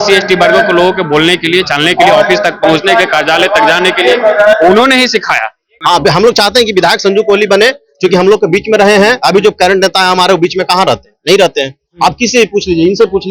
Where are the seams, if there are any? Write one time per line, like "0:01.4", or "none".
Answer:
0:05.8